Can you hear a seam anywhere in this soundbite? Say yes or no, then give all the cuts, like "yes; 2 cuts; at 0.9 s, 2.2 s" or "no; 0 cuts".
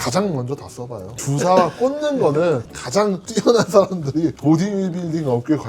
yes; 2 cuts; at 1.1 s, 2.7 s